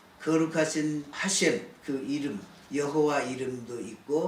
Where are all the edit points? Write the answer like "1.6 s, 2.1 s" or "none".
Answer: 1.1 s, 2.5 s